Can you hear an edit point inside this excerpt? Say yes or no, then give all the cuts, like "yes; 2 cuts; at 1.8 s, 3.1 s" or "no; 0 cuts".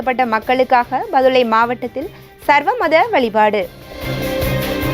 yes; 1 cut; at 4.0 s